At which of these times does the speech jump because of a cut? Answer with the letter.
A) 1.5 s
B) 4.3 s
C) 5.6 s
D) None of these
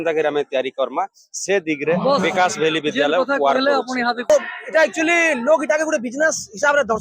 B